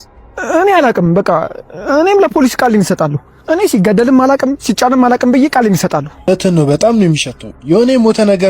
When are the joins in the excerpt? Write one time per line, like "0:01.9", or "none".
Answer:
0:06.3